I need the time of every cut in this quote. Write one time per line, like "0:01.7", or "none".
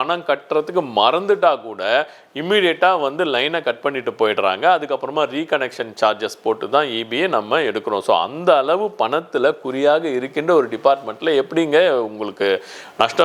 none